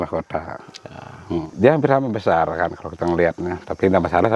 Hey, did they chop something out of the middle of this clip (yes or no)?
yes